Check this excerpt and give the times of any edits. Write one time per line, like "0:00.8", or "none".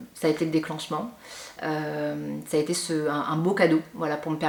none